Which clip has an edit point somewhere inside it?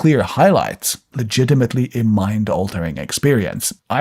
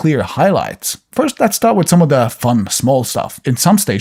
first; 1 cut; at 1.1 s

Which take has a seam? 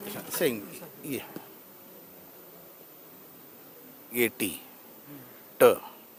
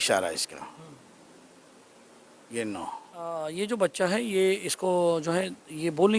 second; 1 cut; at 3.3 s

